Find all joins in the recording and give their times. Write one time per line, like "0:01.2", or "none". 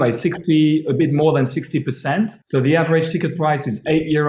0:02.4